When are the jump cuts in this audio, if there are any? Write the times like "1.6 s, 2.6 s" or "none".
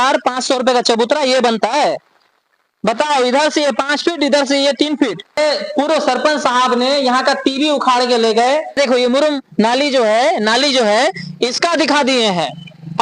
5.4 s, 8.8 s